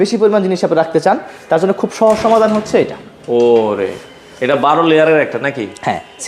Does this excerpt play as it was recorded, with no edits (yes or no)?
yes